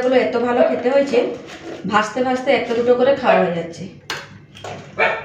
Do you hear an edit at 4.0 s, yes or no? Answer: no